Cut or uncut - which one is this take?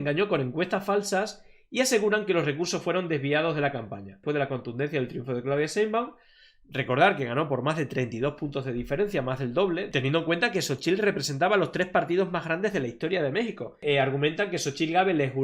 cut